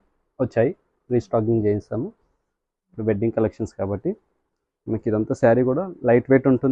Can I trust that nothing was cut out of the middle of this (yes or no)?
yes